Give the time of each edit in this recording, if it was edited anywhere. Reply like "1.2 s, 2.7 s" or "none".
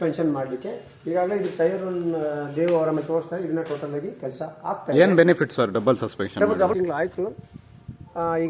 6.8 s